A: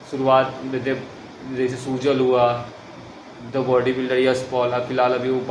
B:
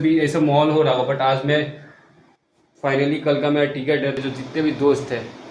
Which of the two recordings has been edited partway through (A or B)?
B